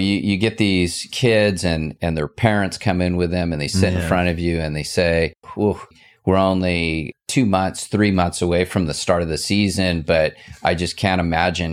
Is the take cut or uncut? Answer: cut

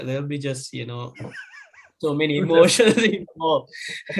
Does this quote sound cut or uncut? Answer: uncut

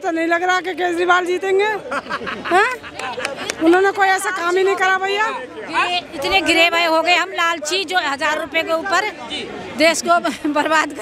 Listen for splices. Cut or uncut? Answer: uncut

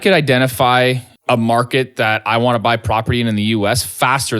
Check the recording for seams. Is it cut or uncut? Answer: cut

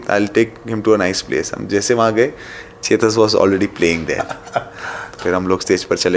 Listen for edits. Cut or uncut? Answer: cut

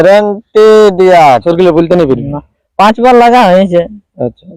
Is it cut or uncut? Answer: cut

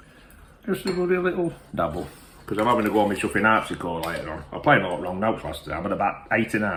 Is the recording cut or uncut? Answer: uncut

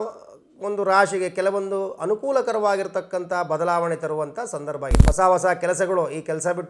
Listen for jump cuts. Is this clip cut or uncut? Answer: cut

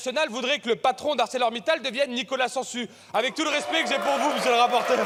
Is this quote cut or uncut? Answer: uncut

